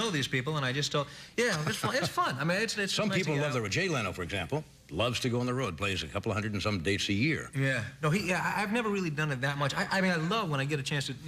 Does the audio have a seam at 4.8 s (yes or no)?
no